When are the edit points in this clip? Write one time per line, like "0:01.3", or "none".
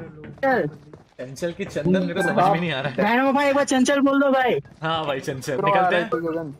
0:05.6